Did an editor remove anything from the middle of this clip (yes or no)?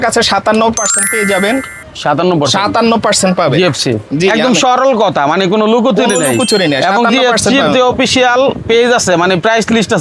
no